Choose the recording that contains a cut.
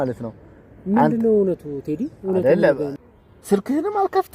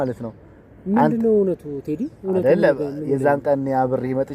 first; 1 cut; at 3.0 s

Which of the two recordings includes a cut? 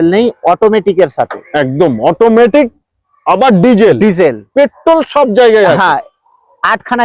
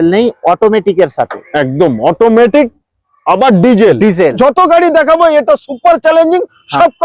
second; 1 cut; at 4.4 s

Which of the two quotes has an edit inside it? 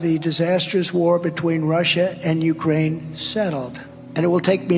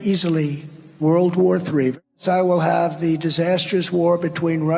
second; 1 cut; at 2.0 s

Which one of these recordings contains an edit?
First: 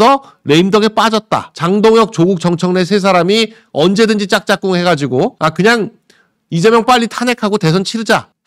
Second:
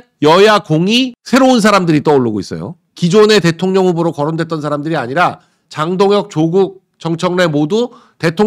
first; 1 cut; at 1.7 s

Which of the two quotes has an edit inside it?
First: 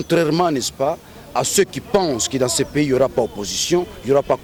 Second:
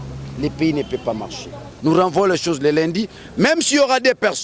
second; 1 cut; at 1.7 s

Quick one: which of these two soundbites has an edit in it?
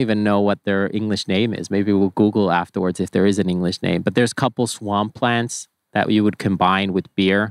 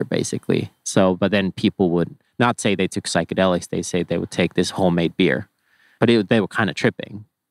second; 1 cut; at 5.9 s

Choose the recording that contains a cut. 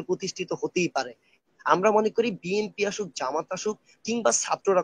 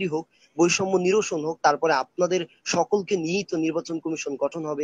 first; 1 cut; at 1.3 s

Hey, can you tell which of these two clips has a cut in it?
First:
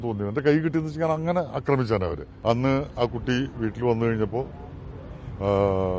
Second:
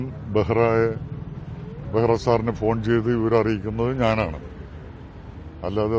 first; 1 cut; at 2.3 s

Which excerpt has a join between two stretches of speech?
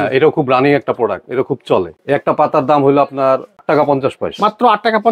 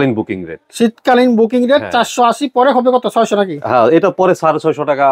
first; 2 cuts; at 1.9 s, 3.6 s

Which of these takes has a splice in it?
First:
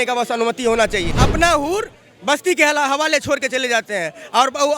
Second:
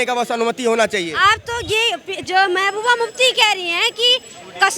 first; 1 cut; at 1.1 s

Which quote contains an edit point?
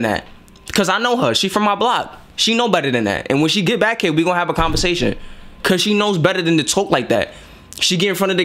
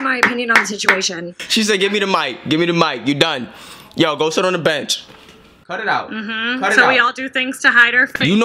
second; 1 cut; at 5.5 s

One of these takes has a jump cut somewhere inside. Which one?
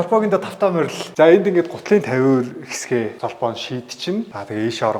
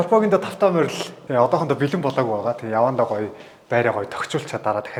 first; 1 cut; at 1.0 s

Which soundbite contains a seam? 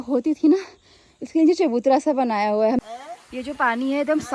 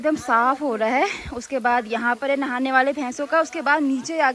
first; 1 cut; at 2.8 s

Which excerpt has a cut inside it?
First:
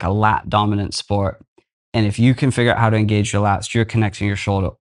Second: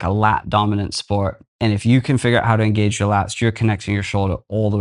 second; 1 cut; at 1.4 s

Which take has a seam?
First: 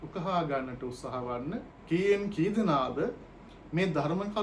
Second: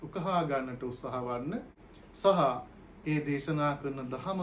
first; 1 cut; at 1.7 s

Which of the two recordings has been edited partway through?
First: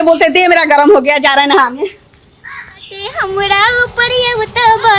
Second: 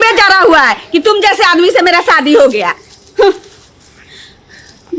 first; 1 cut; at 3.0 s

